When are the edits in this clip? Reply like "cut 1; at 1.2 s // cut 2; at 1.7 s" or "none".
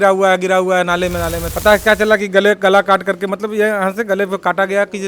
cut 1; at 1.4 s